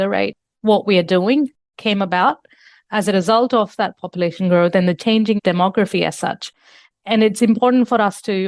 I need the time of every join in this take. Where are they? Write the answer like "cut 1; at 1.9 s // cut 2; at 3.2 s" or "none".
cut 1; at 5.1 s